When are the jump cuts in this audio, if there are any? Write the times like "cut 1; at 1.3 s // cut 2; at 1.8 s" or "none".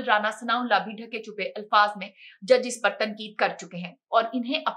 none

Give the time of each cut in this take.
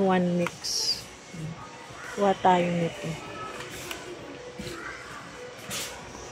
none

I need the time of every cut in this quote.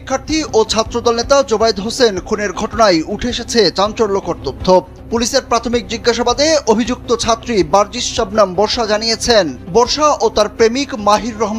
none

